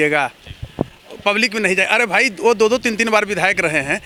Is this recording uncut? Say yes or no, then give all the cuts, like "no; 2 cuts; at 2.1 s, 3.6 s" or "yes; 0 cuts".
yes; 0 cuts